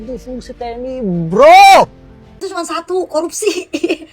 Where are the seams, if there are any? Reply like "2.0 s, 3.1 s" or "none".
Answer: 2.3 s